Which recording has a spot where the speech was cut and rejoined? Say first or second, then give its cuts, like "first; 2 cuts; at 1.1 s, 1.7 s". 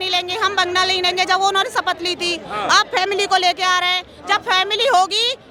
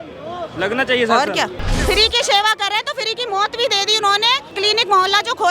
second; 2 cuts; at 1.7 s, 4.5 s